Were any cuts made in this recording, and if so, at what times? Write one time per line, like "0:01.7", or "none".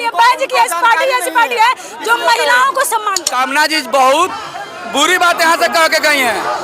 0:03.2